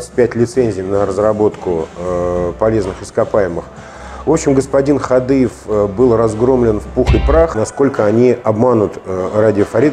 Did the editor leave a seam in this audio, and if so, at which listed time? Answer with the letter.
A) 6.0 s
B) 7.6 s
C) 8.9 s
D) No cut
B